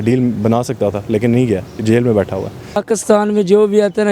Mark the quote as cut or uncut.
cut